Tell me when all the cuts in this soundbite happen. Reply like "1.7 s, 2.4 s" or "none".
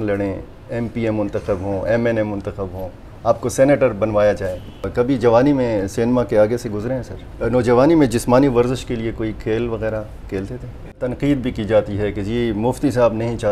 4.8 s, 7.2 s, 11.1 s